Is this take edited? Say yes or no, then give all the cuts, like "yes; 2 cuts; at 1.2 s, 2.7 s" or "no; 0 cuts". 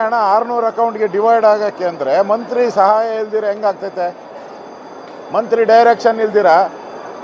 no; 0 cuts